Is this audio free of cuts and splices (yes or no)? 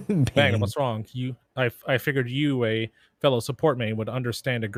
yes